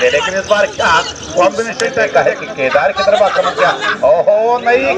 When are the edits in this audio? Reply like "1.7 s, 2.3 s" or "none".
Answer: 2.0 s